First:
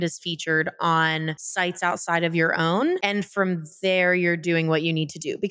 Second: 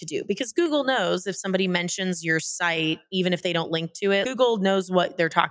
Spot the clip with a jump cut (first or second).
second